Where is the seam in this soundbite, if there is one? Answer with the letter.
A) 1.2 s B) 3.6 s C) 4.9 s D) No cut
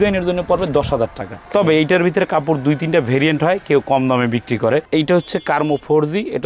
C